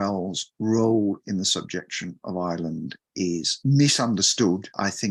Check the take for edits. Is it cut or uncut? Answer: uncut